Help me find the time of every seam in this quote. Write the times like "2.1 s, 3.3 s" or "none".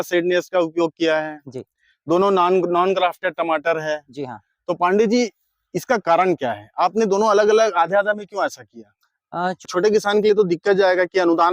9.7 s